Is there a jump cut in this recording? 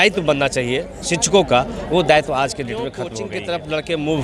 yes; 1 cut; at 3.1 s

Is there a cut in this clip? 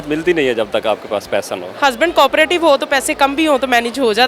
yes; 1 cut; at 1.7 s

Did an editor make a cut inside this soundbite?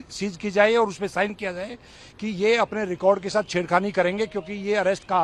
no; 0 cuts

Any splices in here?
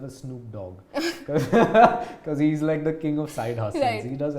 no; 0 cuts

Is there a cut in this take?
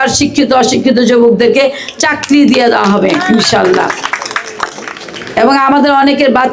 no; 0 cuts

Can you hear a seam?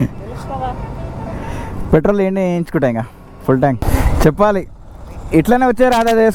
yes; 1 cut; at 3.8 s

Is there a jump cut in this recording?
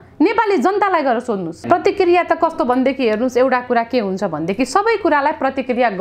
yes; 1 cut; at 1.6 s

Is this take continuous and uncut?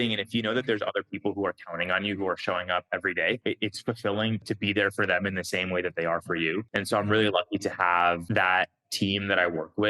no; 4 cuts; at 3.4 s, 4.4 s, 6.7 s, 8.2 s

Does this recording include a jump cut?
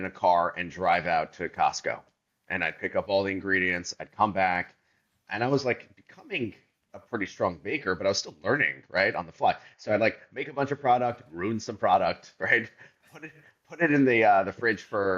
no; 0 cuts

